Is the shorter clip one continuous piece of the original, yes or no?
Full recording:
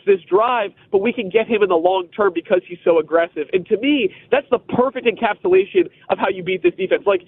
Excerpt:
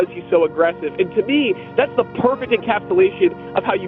yes